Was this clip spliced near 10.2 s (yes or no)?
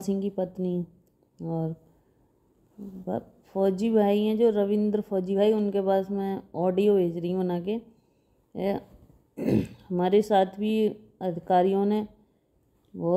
no